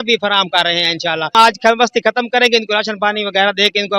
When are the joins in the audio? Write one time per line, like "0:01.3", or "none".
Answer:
0:01.3